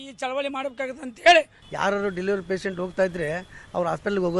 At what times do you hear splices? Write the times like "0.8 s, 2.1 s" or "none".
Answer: 1.6 s